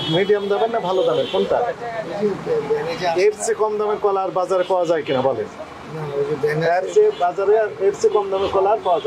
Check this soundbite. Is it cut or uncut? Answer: uncut